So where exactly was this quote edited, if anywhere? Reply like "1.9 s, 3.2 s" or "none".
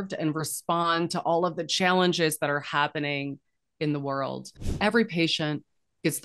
4.8 s